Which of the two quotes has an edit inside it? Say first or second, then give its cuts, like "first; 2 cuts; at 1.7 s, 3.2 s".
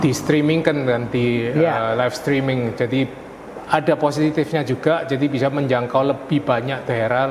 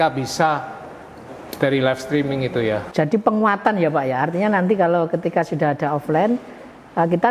second; 1 cut; at 2.8 s